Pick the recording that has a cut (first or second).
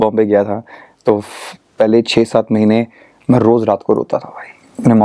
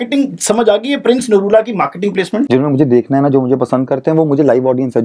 second